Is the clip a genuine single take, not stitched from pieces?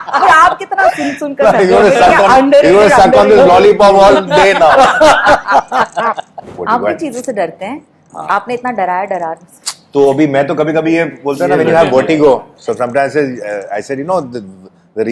no; 1 cut; at 6.6 s

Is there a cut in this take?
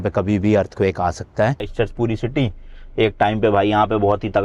yes; 1 cut; at 1.7 s

